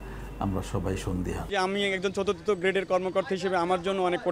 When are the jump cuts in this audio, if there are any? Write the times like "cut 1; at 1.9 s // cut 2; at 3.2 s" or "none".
cut 1; at 1.4 s